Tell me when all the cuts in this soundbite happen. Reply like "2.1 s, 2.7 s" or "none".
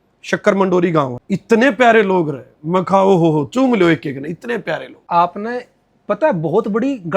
1.2 s, 4.9 s

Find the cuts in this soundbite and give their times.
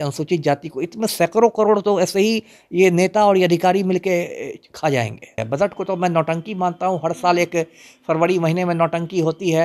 5.4 s

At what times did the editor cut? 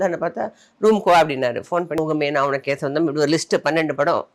2.0 s

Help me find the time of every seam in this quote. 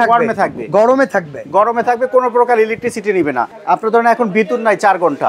3.5 s

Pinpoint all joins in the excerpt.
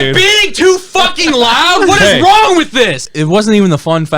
3.0 s

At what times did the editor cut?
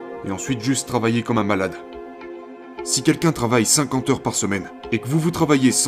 2.4 s, 4.7 s

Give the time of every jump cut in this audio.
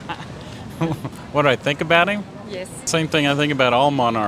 2.8 s

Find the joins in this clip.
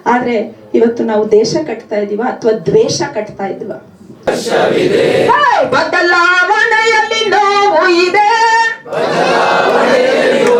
none

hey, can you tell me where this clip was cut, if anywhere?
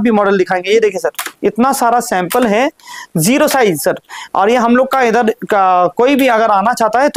none

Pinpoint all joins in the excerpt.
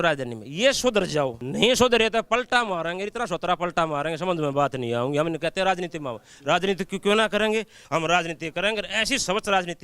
1.4 s, 7.8 s

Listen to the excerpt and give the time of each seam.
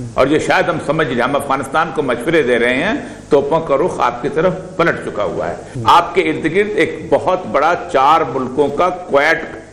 5.7 s

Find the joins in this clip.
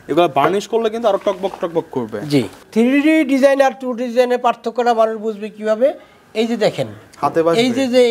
2.6 s

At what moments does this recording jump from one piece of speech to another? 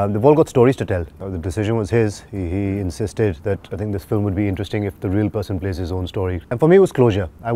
1.2 s, 6.4 s

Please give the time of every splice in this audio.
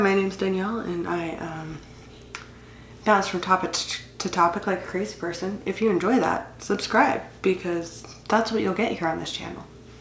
none

